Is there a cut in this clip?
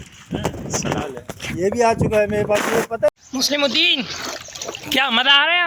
yes; 1 cut; at 3.1 s

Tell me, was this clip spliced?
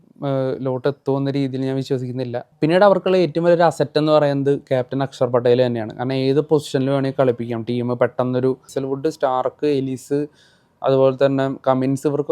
yes; 2 cuts; at 2.5 s, 8.7 s

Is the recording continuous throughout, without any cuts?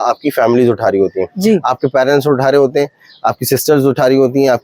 yes; 0 cuts

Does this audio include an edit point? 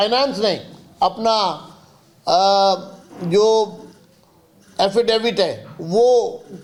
no; 0 cuts

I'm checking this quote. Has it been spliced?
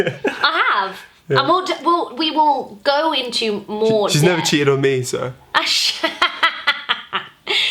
no; 0 cuts

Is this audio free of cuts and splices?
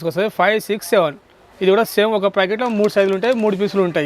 yes; 0 cuts

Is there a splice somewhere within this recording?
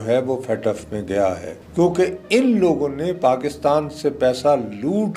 yes; 1 cut; at 1.5 s

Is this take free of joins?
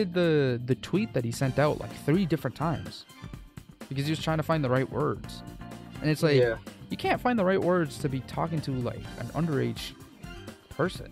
yes; 0 cuts

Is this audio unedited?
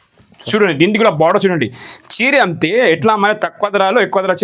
yes; 0 cuts

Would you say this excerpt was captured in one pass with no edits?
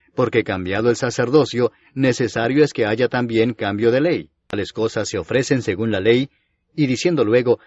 no; 1 cut; at 4.3 s

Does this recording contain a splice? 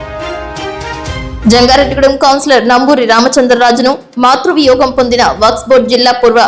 yes; 1 cut; at 0.9 s

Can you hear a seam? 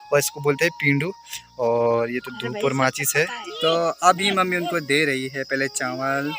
yes; 1 cut; at 3.5 s

